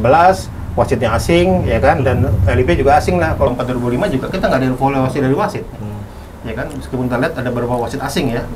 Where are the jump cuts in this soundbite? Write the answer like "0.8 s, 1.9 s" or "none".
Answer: 3.5 s